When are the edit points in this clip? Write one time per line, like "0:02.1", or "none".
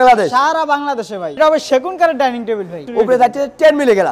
0:01.4
0:02.8